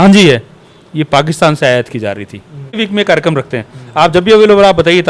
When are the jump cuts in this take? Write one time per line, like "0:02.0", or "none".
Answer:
0:02.8